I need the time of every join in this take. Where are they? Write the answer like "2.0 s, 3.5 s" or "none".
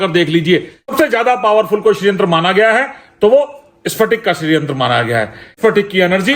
0.9 s, 5.5 s

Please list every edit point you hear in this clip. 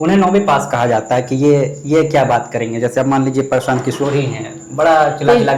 none

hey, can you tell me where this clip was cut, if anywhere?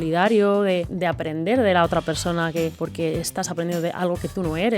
0.9 s, 2.7 s

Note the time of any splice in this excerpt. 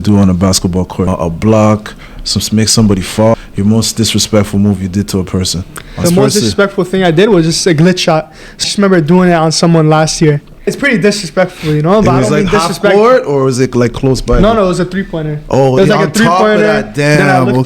1.1 s, 3.3 s, 6.0 s, 8.6 s, 10.7 s

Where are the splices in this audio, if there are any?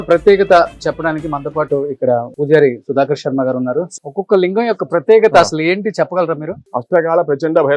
3.9 s, 6.6 s

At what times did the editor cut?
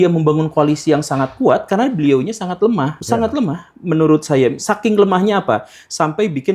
3.0 s

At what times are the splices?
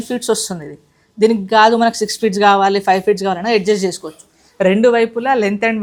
none

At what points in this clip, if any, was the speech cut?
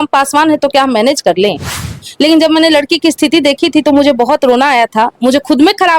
2.1 s

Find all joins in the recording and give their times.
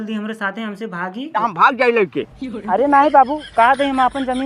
1.3 s

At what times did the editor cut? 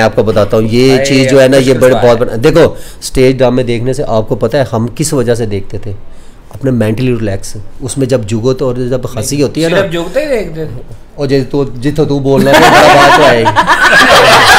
none

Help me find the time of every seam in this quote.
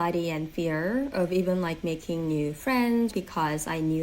3.1 s

